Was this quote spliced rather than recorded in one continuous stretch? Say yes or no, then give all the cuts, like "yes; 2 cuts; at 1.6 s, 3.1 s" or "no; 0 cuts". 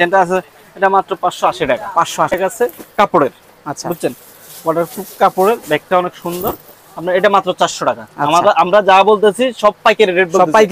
yes; 1 cut; at 2.3 s